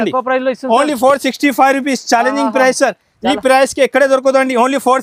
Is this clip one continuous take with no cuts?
yes; 0 cuts

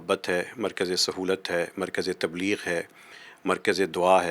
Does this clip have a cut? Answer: no; 0 cuts

